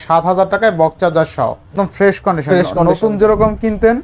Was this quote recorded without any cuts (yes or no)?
no